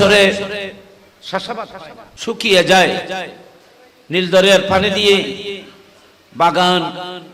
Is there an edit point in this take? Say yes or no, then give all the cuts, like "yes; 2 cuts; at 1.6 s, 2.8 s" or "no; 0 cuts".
yes; 1 cut; at 2.0 s